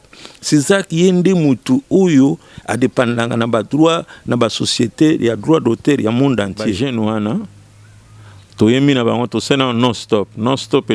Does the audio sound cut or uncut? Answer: cut